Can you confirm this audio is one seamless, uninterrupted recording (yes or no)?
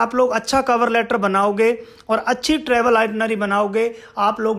yes